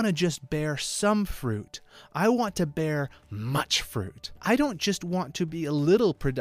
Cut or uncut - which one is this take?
cut